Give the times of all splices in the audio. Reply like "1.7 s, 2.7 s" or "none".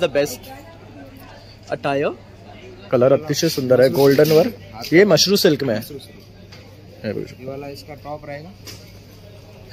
2.9 s

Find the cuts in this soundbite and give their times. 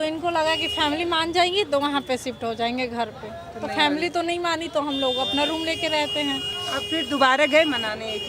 6.5 s

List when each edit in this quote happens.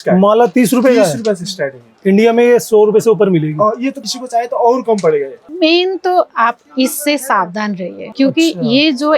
4.0 s, 5.4 s, 8.0 s

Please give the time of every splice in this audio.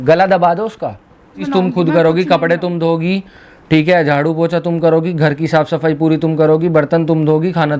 1.5 s

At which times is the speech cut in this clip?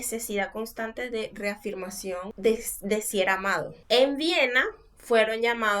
2.3 s, 3.8 s

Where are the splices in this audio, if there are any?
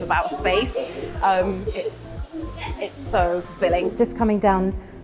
3.9 s

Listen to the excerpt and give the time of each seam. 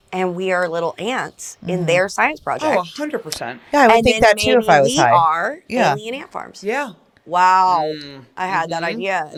none

